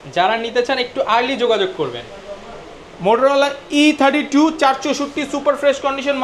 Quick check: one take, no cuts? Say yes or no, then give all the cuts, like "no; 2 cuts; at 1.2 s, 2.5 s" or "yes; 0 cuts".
yes; 0 cuts